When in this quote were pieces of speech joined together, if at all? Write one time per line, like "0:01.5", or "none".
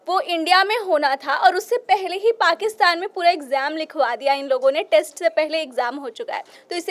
none